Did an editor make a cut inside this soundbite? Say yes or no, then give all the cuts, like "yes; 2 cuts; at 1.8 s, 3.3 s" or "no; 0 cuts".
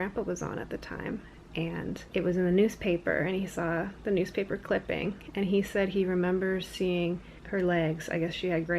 yes; 2 cuts; at 2.0 s, 7.3 s